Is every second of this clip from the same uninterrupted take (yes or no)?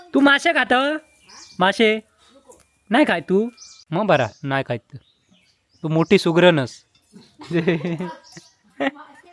yes